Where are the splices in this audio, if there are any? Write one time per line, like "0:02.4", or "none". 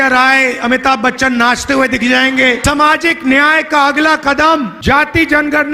0:02.6
0:04.7